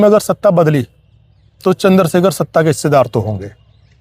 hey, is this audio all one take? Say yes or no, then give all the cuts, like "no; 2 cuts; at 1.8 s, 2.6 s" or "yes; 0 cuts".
yes; 0 cuts